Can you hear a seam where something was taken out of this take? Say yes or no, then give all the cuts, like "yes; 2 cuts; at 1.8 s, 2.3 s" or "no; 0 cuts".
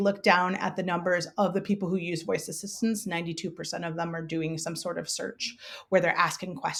no; 0 cuts